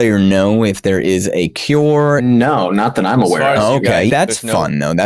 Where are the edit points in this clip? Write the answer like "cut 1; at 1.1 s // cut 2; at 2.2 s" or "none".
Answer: cut 1; at 2.2 s // cut 2; at 4.1 s